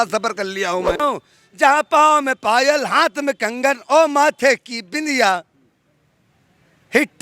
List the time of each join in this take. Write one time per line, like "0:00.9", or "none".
0:01.0